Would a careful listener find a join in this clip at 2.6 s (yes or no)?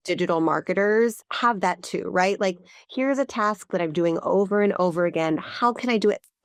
no